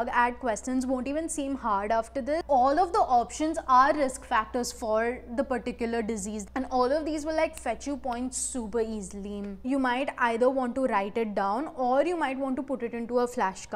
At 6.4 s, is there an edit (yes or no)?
yes